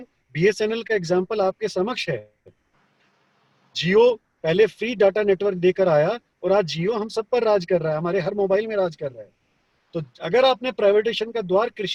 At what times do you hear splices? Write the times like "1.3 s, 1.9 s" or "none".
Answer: none

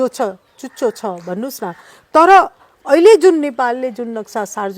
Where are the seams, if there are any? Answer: none

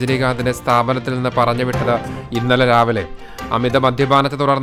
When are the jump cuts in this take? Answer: none

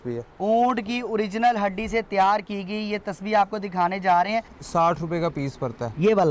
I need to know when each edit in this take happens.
4.6 s

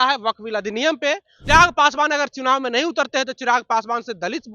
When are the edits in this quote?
1.3 s

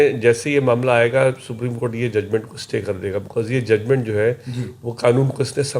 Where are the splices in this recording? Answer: none

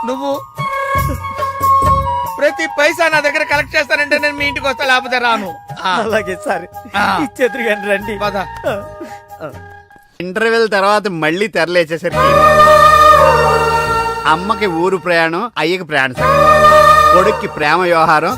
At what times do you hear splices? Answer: 10.2 s

